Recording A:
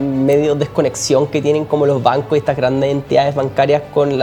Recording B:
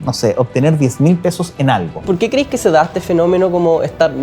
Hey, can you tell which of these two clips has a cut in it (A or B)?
B